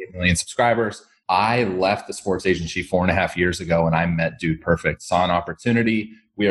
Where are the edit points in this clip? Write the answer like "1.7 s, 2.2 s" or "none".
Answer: 1.1 s